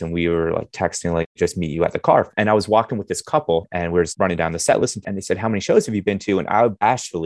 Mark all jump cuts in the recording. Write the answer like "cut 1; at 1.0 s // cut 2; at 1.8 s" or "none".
cut 1; at 1.3 s // cut 2; at 2.3 s // cut 3; at 4.1 s // cut 4; at 5.1 s